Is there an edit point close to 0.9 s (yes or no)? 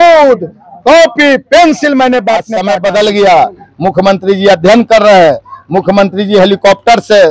no